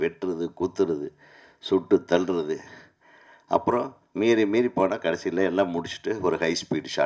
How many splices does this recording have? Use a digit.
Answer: 0